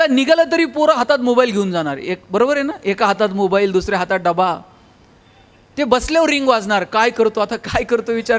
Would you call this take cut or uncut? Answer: uncut